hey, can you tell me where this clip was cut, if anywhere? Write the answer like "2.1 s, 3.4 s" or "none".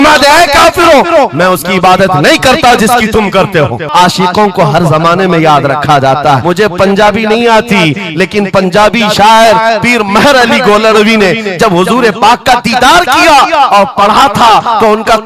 3.9 s, 6.4 s